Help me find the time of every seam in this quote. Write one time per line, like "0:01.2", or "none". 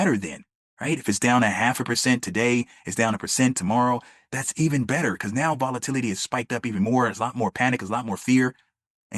none

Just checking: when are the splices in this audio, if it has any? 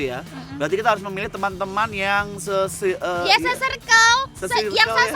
none

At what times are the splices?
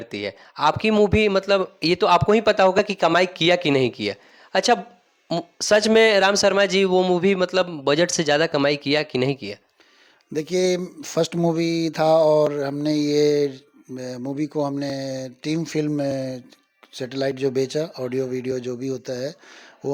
none

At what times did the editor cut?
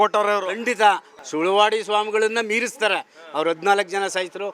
0:01.1

